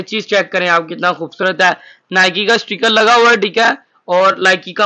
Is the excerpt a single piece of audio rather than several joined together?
yes; 0 cuts

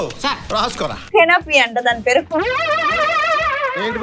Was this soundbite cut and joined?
yes; 1 cut; at 1.0 s

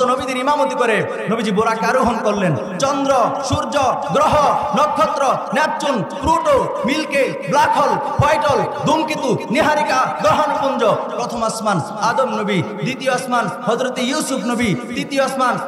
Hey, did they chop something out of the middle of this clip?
no; 0 cuts

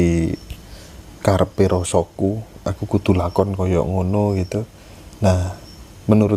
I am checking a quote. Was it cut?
no; 0 cuts

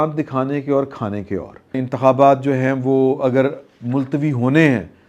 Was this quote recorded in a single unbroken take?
no; 1 cut; at 1.9 s

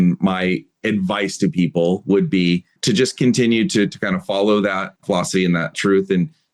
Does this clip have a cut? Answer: yes; 1 cut; at 5.4 s

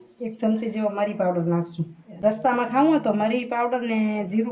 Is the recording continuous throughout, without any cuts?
yes; 0 cuts

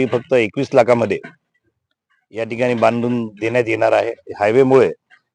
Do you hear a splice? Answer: yes; 1 cut; at 4.2 s

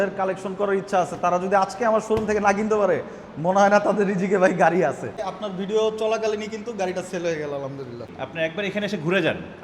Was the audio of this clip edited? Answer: yes; 2 cuts; at 5.2 s, 8.2 s

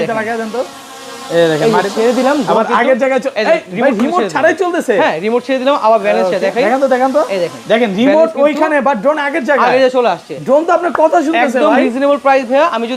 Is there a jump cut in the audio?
no; 0 cuts

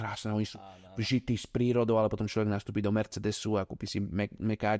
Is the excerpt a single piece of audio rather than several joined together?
yes; 0 cuts

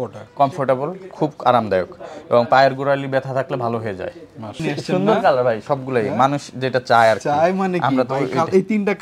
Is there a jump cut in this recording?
yes; 1 cut; at 4.6 s

